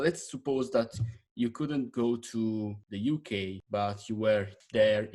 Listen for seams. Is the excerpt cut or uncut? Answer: uncut